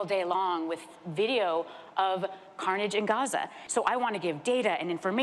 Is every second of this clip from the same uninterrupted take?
no; 1 cut; at 3.6 s

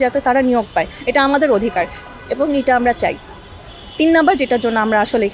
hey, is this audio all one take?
yes; 0 cuts

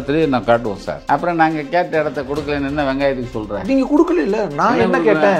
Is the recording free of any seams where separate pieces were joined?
no; 1 cut; at 0.9 s

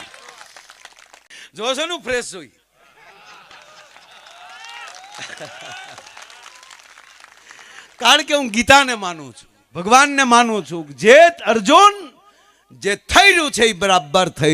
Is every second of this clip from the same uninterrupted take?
no; 1 cut; at 1.3 s

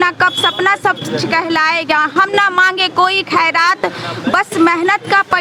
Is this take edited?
no; 0 cuts

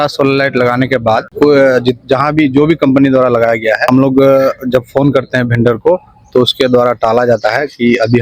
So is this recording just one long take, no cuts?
no; 2 cuts; at 1.3 s, 3.8 s

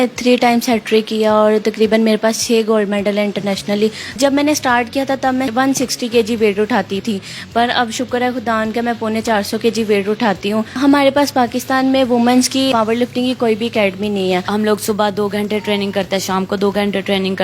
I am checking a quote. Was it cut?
yes; 6 cuts; at 4.2 s, 5.5 s, 7.0 s, 10.7 s, 12.7 s, 14.5 s

